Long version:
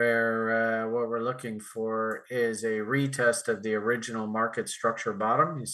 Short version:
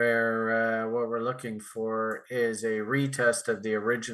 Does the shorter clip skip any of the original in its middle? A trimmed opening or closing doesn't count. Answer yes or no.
no